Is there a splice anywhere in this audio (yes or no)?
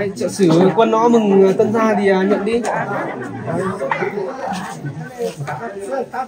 no